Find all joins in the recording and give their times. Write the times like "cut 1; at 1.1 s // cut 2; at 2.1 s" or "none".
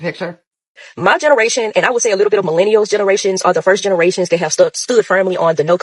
cut 1; at 1.1 s